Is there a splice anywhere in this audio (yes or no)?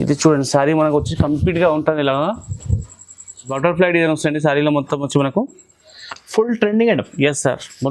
yes